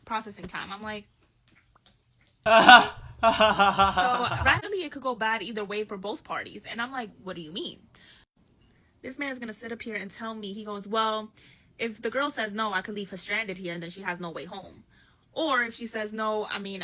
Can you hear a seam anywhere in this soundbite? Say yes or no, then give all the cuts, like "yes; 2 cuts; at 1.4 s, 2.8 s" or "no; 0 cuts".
yes; 1 cut; at 4.6 s